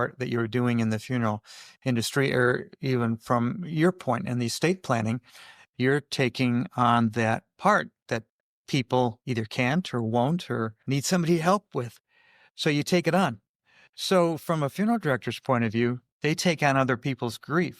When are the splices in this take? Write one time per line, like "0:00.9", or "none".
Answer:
0:16.1